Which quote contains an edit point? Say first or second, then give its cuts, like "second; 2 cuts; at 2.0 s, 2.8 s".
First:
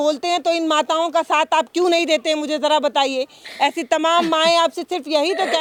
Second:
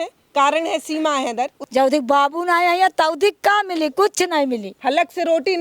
second; 2 cuts; at 1.6 s, 4.7 s